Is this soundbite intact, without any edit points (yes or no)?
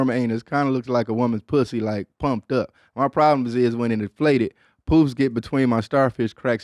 yes